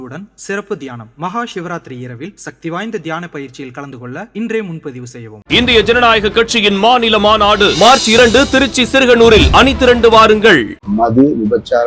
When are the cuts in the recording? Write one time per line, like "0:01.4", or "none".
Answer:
0:10.8